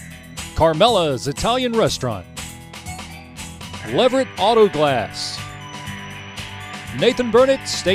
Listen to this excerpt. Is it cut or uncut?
uncut